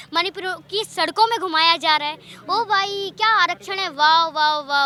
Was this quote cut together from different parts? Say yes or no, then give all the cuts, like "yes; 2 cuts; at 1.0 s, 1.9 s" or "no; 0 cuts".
no; 0 cuts